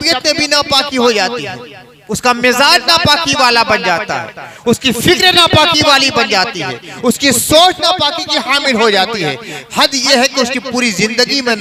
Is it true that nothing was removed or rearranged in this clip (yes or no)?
yes